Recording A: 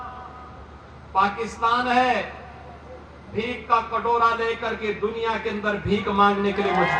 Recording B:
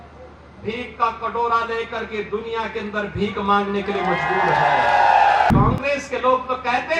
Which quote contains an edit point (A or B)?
B